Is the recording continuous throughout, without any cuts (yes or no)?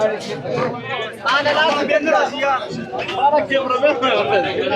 yes